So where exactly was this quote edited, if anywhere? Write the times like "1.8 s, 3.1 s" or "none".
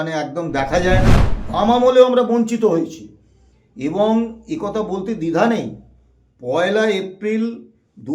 1.3 s